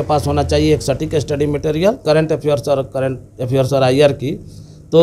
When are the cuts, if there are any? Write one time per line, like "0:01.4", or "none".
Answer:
0:02.0